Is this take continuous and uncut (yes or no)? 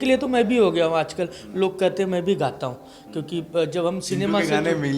yes